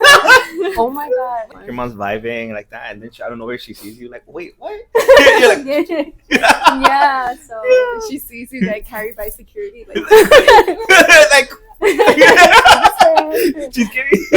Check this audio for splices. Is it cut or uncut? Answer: cut